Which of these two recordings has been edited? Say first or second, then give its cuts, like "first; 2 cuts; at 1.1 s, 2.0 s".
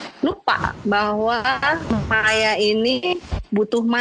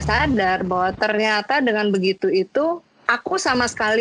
first; 1 cut; at 1.8 s